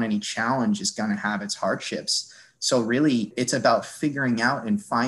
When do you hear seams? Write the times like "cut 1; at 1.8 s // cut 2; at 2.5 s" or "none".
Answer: cut 1; at 3.3 s